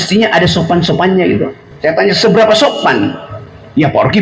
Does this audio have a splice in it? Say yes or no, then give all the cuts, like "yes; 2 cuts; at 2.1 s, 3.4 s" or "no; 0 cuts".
yes; 1 cut; at 1.6 s